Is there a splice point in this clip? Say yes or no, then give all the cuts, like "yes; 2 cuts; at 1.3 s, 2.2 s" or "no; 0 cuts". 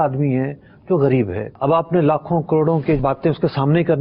yes; 2 cuts; at 1.5 s, 3.0 s